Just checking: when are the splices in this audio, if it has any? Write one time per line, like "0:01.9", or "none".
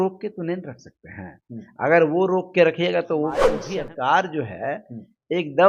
0:03.5